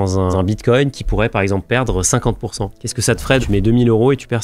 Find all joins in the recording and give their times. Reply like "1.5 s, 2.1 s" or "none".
none